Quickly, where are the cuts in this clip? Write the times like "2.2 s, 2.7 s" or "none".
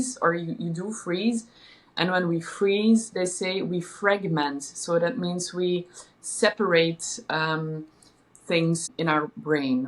8.9 s